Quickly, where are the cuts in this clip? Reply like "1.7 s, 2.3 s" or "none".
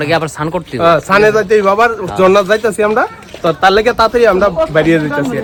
none